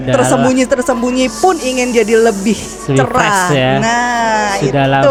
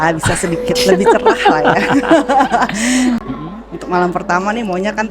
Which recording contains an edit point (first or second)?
second